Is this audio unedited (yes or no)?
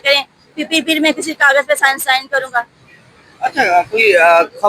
yes